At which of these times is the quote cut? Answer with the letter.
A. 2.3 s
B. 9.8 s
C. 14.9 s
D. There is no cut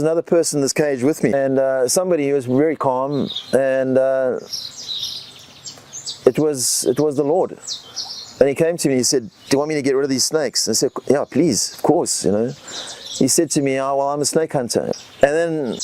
C